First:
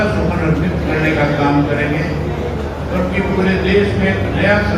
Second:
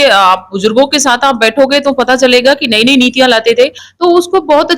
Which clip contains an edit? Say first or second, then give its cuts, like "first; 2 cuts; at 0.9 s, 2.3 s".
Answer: second; 1 cut; at 3.8 s